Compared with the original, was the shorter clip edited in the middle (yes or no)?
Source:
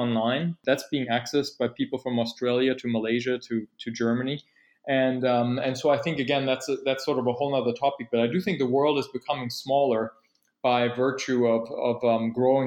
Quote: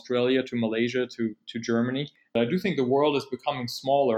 yes